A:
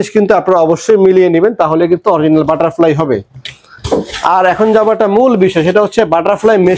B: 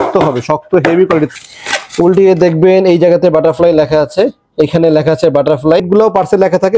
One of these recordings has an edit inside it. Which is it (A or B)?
B